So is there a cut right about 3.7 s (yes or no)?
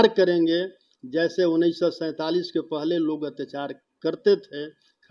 no